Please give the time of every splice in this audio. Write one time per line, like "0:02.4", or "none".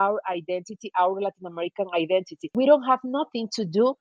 0:02.5